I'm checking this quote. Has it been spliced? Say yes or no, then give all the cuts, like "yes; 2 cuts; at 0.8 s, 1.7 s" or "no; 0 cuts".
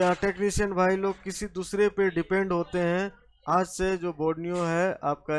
no; 0 cuts